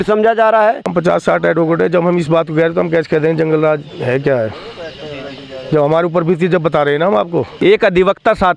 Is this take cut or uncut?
cut